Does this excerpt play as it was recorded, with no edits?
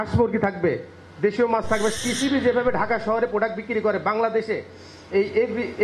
no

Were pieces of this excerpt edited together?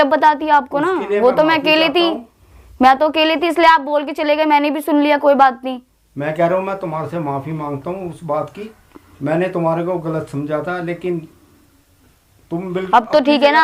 no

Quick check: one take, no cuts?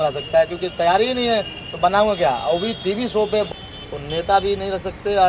no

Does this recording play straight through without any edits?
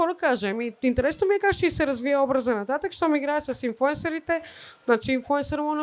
yes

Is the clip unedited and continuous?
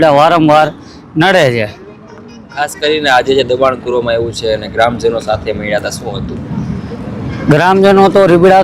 yes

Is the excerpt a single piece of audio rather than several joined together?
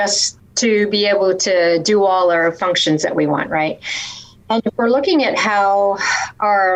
yes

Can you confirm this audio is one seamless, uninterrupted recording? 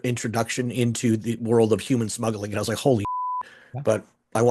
no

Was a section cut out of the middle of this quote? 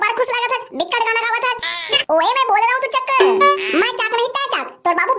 yes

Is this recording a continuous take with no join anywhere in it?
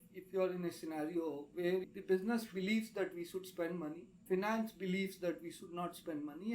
no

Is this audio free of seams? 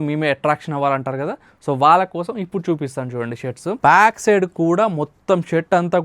no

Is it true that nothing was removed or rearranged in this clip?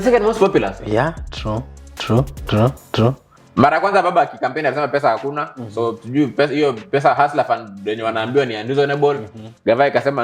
no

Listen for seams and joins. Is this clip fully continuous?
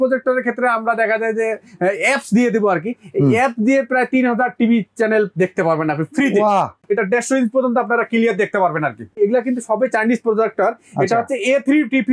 no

